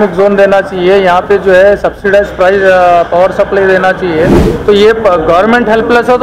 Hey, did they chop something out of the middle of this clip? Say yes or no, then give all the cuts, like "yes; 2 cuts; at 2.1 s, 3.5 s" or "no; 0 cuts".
yes; 1 cut; at 4.5 s